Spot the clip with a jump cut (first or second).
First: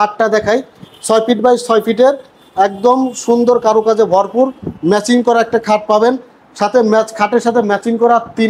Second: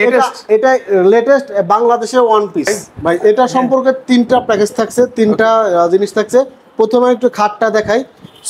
second